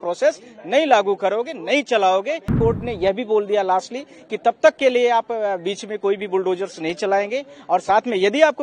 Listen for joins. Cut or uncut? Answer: cut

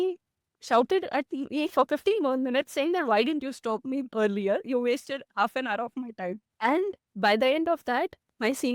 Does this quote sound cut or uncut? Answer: cut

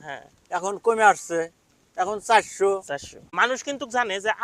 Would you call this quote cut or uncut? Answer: cut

